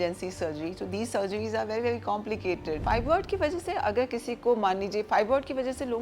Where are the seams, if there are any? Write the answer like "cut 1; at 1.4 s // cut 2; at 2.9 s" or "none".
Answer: cut 1; at 2.7 s

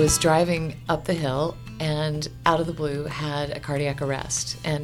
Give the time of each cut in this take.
none

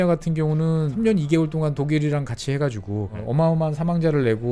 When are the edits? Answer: cut 1; at 0.9 s // cut 2; at 3.2 s

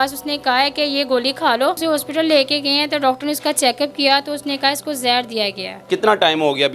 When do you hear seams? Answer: cut 1; at 1.8 s // cut 2; at 5.8 s

